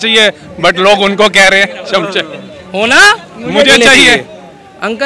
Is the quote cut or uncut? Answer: uncut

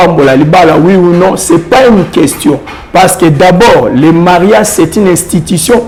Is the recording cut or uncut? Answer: uncut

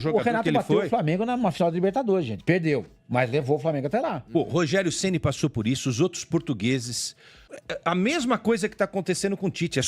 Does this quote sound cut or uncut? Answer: cut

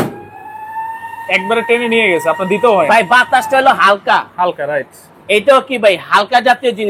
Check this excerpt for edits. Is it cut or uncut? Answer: uncut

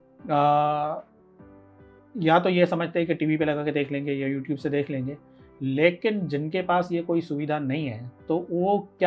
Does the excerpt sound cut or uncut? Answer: uncut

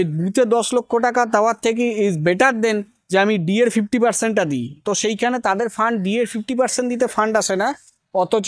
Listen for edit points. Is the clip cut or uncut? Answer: uncut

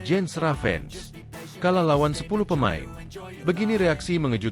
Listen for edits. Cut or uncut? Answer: uncut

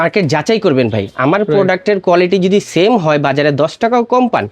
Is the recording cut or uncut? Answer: uncut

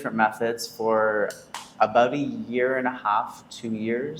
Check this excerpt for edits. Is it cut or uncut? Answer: uncut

